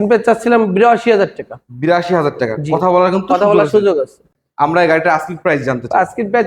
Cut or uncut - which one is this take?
cut